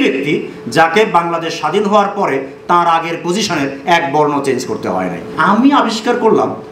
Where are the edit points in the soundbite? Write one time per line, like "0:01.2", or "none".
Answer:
0:05.3